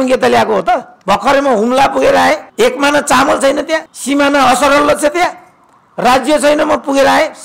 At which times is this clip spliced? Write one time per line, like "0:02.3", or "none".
0:00.9
0:02.5
0:03.9